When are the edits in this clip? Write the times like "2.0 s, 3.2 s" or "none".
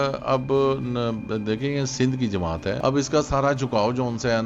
2.8 s